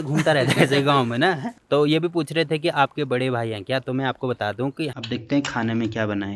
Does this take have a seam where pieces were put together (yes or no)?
yes